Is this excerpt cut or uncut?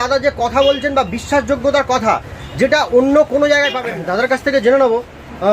cut